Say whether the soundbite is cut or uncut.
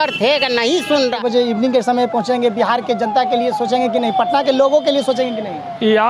cut